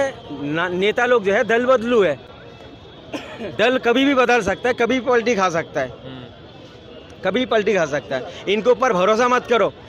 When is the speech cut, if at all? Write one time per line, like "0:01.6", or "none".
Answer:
none